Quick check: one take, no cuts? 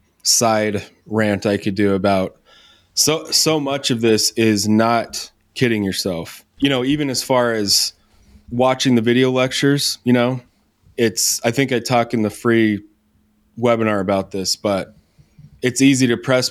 yes; 0 cuts

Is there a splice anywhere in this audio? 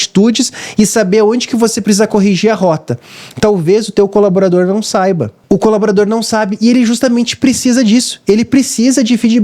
yes; 1 cut; at 5.3 s

